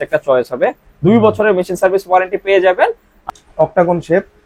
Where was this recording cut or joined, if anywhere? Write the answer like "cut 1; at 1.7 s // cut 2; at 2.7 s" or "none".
cut 1; at 3.1 s